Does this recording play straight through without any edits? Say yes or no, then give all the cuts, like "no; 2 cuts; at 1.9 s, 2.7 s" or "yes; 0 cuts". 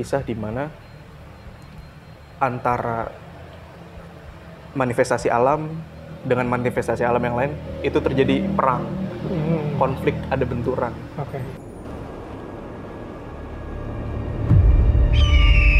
yes; 0 cuts